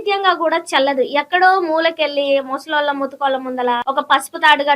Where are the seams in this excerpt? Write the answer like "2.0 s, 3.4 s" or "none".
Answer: 3.8 s